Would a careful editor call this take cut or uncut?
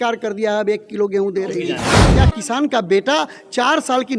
cut